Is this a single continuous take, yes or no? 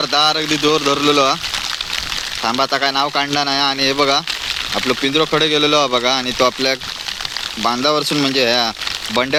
yes